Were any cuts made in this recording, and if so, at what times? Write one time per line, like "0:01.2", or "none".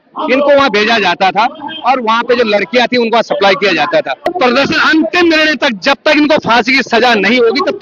0:04.3